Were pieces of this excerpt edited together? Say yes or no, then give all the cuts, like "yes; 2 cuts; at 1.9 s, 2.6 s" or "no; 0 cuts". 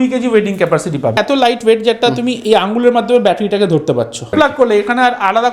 yes; 2 cuts; at 1.2 s, 4.3 s